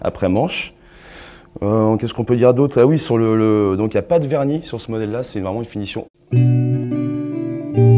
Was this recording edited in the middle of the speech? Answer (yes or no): no